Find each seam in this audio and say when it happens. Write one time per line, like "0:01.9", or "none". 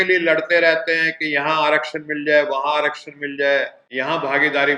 0:03.8